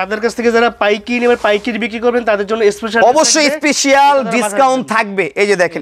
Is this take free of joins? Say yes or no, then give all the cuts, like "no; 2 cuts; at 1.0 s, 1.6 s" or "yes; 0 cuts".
yes; 0 cuts